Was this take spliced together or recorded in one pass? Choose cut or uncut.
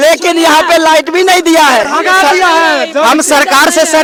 uncut